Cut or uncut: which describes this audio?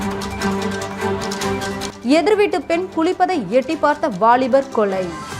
cut